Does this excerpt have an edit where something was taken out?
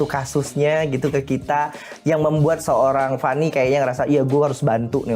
no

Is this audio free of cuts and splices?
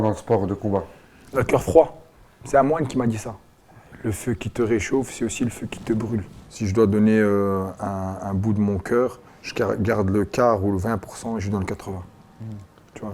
no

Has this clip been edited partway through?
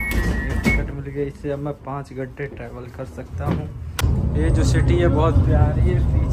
yes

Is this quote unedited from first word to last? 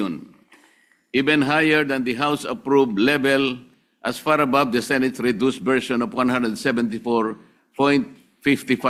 yes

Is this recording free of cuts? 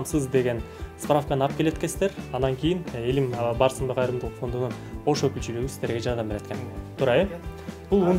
yes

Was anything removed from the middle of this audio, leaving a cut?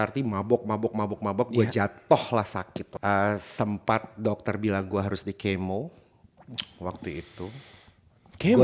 yes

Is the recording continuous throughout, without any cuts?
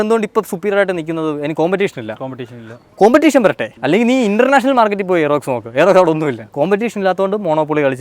yes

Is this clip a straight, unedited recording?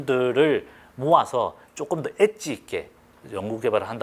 yes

